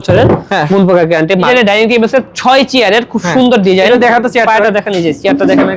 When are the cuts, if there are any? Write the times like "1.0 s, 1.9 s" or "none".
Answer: 1.5 s